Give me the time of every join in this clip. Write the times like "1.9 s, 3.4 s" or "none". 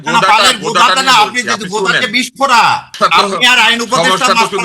2.9 s